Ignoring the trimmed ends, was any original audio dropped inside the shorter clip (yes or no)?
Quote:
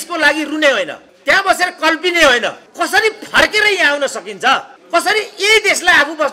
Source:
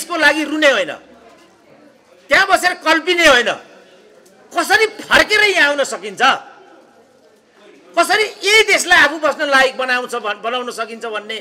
yes